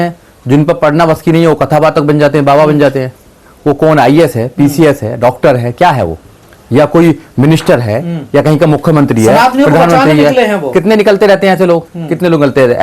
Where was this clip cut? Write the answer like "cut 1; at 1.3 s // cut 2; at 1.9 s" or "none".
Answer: none